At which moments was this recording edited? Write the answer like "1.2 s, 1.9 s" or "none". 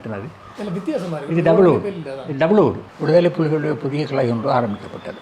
2.9 s

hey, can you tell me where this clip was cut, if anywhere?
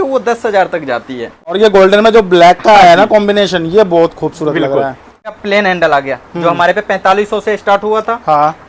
1.6 s, 5.3 s

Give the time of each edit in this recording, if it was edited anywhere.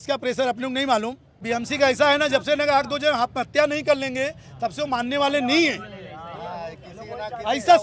1.4 s

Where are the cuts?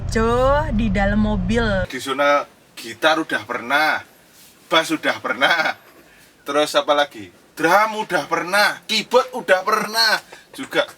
1.9 s

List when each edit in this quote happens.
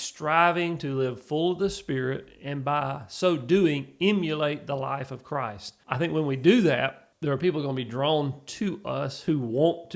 5.7 s, 7.1 s

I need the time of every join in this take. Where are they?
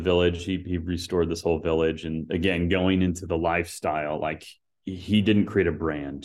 none

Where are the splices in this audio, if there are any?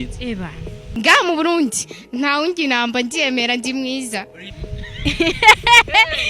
none

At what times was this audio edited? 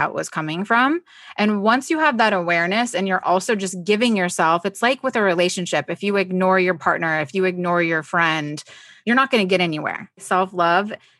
10.2 s

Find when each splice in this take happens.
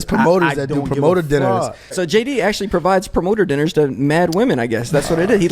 1.8 s

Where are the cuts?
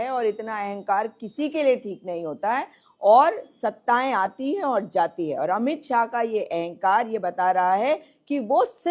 none

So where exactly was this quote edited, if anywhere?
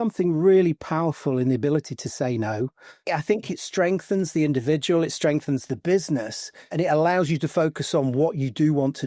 3.0 s, 6.7 s

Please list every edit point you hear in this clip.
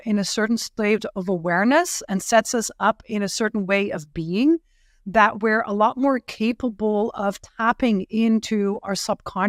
none

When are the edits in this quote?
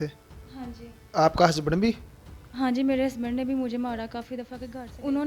4.4 s

